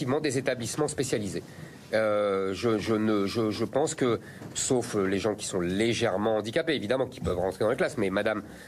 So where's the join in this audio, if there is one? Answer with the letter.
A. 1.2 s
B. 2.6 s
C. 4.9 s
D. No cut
A